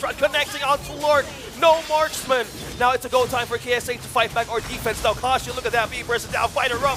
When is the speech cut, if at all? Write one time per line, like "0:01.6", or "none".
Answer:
none